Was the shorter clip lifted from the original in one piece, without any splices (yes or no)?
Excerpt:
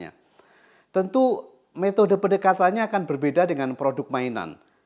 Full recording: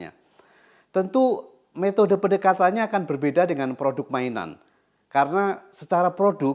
yes